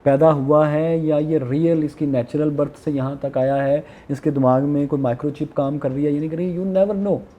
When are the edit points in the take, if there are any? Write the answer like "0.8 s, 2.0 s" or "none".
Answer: none